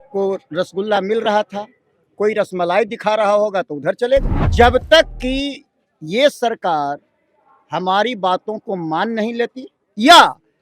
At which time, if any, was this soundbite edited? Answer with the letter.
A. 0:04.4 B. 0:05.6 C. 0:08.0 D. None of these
A